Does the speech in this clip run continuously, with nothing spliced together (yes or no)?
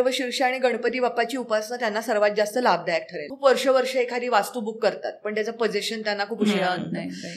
no